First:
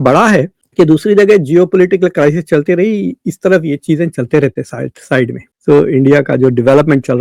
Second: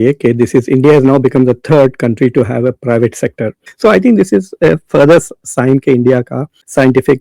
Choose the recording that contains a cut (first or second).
second